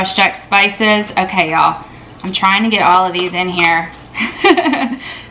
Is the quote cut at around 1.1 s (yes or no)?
no